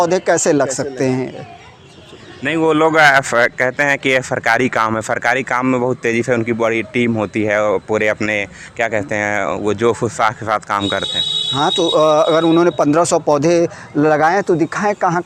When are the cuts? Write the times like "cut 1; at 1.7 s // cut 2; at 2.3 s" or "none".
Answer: none